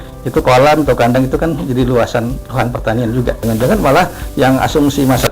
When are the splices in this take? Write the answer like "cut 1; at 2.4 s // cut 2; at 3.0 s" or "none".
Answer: cut 1; at 3.4 s